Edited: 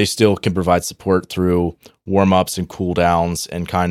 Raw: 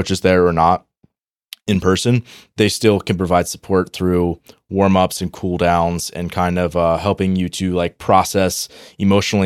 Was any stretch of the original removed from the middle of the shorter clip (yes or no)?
no